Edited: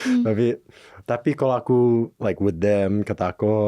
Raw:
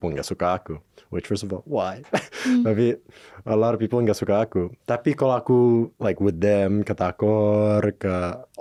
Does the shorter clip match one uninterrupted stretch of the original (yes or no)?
no